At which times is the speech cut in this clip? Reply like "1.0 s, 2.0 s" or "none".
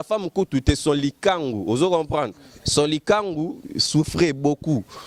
none